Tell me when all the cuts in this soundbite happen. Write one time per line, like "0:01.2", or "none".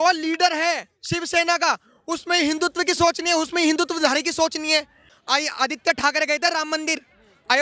0:05.1